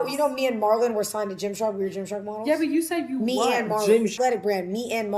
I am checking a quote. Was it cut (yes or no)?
yes